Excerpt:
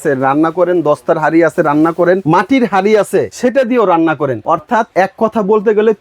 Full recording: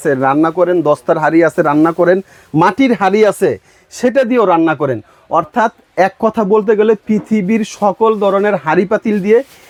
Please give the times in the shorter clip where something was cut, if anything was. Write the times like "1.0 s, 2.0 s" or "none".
2.2 s, 3.3 s, 4.7 s